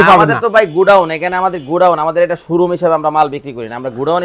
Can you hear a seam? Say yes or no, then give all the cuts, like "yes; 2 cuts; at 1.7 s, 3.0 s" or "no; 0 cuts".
no; 0 cuts